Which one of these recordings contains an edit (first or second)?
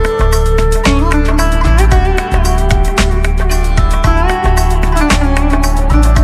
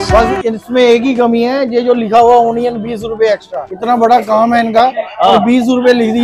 first